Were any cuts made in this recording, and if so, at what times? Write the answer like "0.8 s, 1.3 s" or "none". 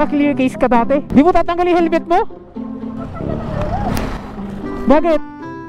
1.1 s